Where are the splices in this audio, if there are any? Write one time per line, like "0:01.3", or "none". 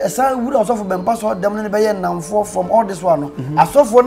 none

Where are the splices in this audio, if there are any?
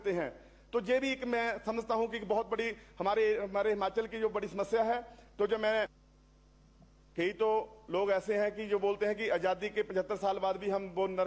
0:06.0

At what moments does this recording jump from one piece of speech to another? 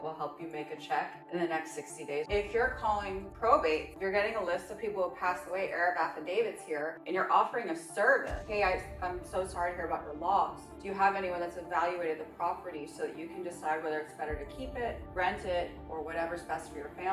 0:02.3

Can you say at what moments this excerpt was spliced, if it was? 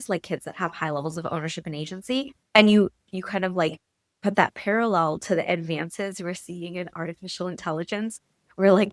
0:02.4

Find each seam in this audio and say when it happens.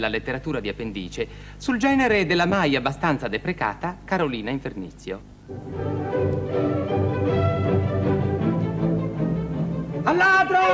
none

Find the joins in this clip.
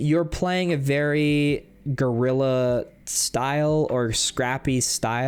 none

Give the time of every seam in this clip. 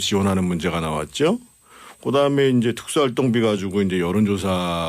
0:03.2

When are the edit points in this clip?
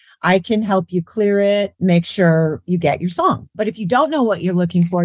0:01.7
0:03.5

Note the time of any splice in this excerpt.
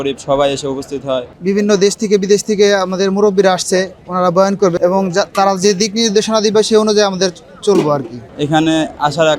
0:01.3
0:08.3

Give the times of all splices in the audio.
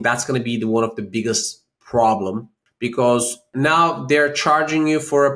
0:02.5
0:03.5

